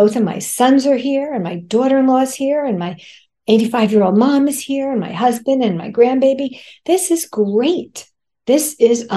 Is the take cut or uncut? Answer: uncut